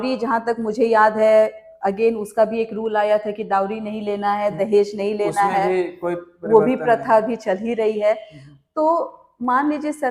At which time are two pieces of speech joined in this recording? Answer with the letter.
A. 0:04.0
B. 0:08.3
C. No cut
C